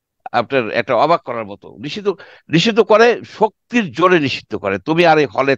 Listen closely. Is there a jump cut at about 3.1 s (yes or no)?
no